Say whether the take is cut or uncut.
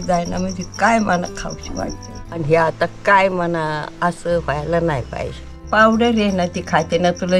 cut